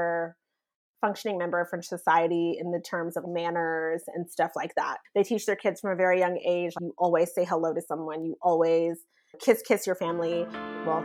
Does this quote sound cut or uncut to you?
uncut